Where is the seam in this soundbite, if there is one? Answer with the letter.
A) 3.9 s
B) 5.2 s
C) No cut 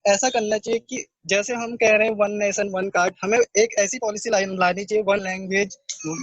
B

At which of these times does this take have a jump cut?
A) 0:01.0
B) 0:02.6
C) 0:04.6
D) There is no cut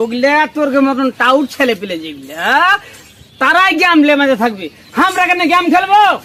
D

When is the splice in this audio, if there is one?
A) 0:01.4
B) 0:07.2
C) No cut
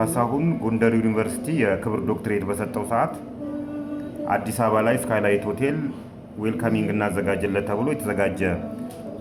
C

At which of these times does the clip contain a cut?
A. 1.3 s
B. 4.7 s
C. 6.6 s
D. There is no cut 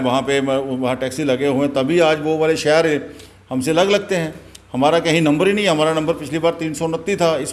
D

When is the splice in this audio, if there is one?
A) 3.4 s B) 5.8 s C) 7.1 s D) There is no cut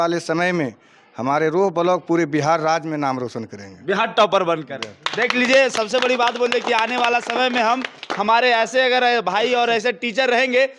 D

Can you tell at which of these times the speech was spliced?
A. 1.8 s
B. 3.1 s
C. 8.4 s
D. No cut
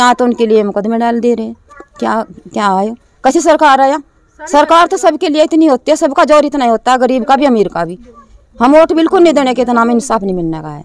D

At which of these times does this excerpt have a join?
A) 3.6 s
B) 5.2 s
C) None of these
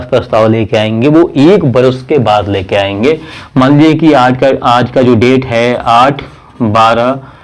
C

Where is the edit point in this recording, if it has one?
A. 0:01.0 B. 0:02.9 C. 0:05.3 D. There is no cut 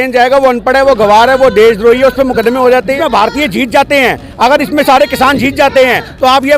B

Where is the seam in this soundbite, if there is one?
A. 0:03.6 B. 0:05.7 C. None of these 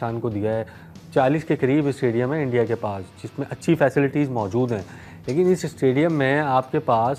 C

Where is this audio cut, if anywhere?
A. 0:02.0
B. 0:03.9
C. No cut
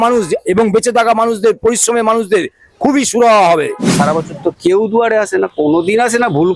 B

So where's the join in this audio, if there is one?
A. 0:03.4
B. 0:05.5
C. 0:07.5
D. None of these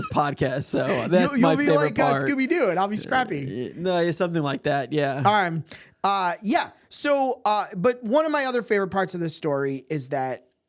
D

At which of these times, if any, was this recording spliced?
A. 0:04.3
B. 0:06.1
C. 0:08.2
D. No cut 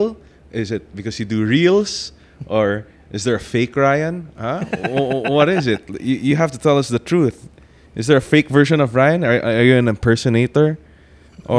D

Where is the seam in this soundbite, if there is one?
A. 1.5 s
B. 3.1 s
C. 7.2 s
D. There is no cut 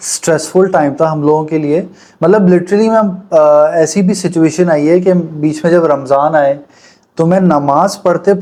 D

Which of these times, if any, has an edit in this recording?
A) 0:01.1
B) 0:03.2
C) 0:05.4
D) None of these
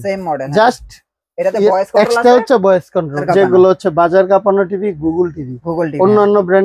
B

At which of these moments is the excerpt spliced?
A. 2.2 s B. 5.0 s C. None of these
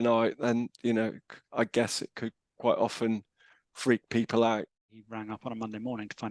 B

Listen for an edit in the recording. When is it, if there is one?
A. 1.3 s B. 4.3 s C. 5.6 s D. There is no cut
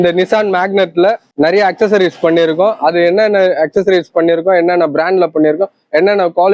A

